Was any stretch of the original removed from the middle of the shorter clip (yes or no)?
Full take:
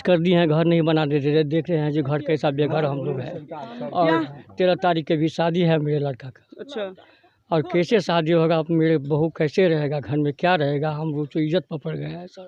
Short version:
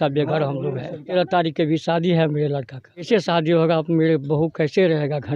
yes